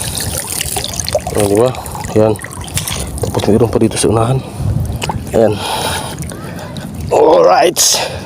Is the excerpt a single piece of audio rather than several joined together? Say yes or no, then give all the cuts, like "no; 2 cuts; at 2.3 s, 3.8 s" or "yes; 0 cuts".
no; 1 cut; at 5.0 s